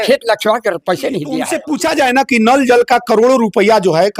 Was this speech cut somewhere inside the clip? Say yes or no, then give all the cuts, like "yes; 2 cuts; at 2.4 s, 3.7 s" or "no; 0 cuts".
yes; 1 cut; at 1.6 s